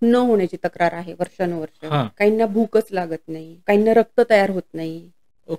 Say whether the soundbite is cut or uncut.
cut